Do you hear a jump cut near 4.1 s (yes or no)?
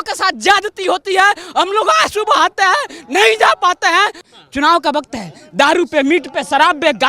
yes